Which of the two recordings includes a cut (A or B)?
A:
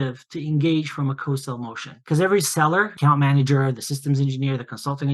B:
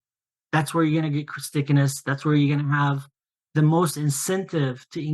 A